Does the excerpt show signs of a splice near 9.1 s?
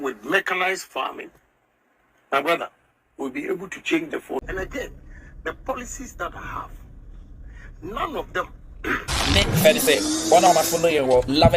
yes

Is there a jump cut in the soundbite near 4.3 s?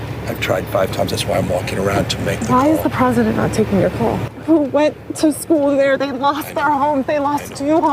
yes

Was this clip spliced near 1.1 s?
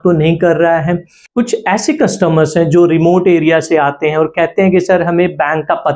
yes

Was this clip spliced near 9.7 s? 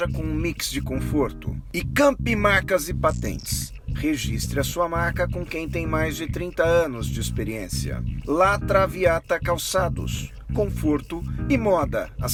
no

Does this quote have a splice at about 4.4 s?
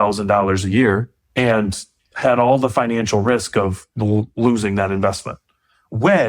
no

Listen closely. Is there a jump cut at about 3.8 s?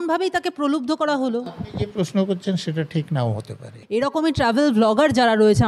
yes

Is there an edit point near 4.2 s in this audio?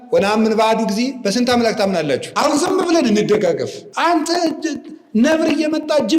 no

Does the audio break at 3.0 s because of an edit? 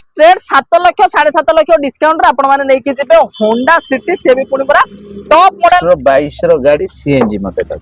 no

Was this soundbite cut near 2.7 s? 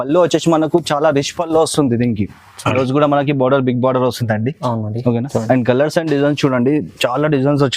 yes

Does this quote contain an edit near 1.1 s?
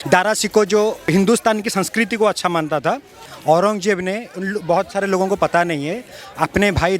yes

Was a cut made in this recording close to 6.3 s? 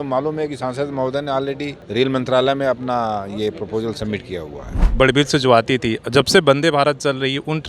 no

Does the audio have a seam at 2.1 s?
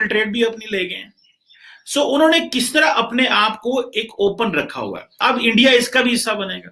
no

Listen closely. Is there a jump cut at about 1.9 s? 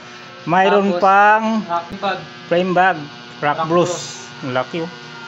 yes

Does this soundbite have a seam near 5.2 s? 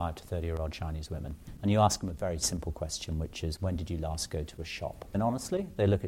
yes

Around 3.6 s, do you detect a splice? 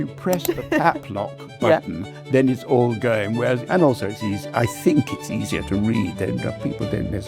yes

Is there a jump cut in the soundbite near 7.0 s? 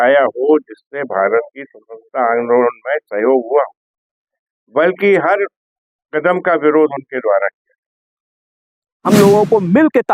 no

